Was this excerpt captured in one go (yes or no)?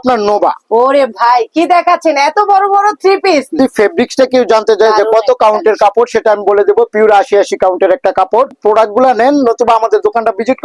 no